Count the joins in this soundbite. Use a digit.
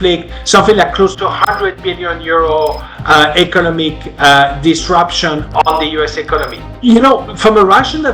1